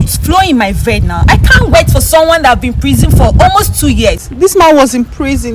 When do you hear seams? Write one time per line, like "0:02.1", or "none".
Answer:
0:04.2